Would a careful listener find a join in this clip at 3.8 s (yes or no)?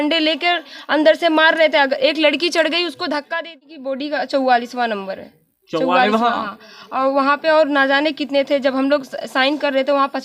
yes